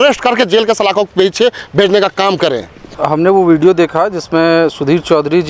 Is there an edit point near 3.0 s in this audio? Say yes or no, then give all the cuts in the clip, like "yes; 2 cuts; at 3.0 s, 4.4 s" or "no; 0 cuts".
yes; 1 cut; at 3.0 s